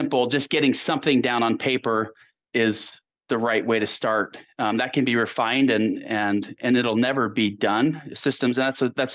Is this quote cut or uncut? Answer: cut